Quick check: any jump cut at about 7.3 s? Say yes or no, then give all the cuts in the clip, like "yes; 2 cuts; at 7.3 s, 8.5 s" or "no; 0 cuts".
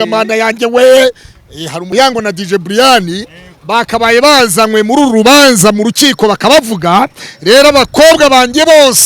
no; 1 cut; at 1.8 s